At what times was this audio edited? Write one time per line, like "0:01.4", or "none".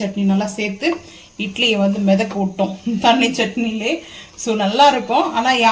none